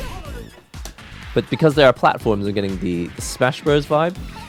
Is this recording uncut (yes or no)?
yes